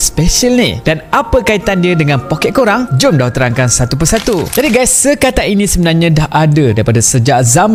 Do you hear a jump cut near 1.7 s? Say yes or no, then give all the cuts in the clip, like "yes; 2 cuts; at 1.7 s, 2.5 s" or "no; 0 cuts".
no; 0 cuts